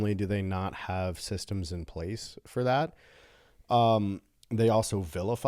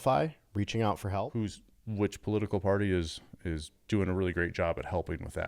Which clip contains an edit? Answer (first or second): second